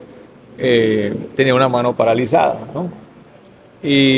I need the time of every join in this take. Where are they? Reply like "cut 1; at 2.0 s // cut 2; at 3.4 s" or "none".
none